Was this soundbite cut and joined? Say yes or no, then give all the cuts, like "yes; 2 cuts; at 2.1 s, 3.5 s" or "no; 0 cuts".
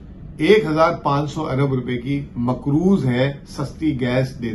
no; 0 cuts